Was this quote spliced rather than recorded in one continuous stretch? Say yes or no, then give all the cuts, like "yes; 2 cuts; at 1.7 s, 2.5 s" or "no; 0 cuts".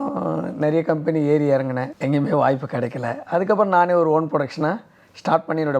yes; 1 cut; at 1.9 s